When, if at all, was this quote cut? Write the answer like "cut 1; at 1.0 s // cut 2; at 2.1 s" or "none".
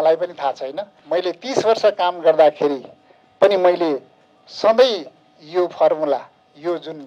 cut 1; at 1.0 s